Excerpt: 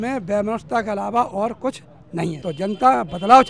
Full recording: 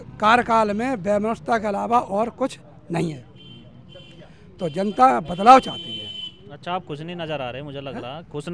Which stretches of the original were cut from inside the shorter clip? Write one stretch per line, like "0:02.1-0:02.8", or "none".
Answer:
0:03.1-0:04.5